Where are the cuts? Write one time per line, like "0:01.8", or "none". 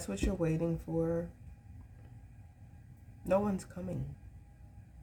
none

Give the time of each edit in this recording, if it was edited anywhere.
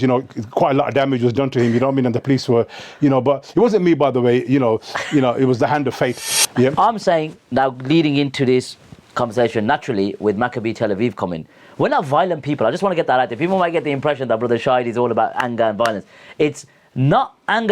0:06.7

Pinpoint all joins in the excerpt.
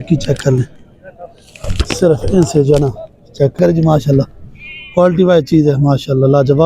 0:03.5

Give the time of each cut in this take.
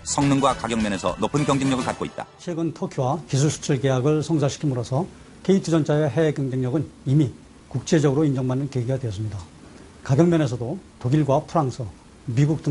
none

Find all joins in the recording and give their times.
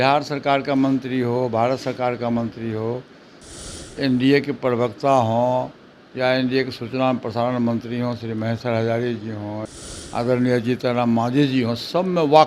0:09.6

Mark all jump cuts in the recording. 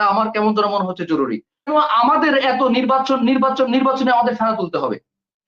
0:01.7

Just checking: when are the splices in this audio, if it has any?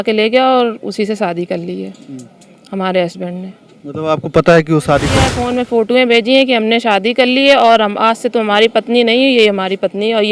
0:05.3

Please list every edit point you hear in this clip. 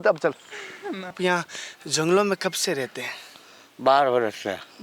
0:01.1

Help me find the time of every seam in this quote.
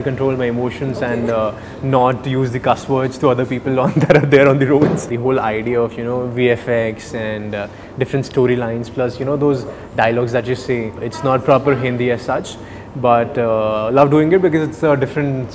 0:05.1
0:11.0

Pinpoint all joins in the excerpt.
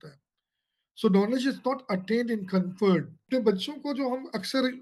0:03.2

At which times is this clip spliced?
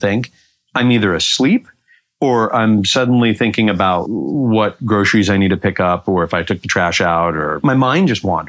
0:04.0
0:07.6

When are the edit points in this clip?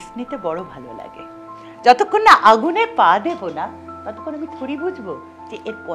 none

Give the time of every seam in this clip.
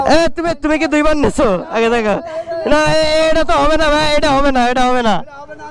none

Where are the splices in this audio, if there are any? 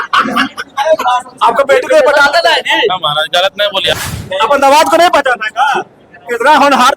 0:03.9

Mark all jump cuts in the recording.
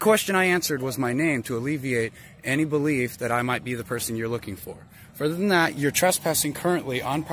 none

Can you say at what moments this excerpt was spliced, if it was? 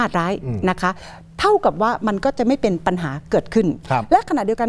none

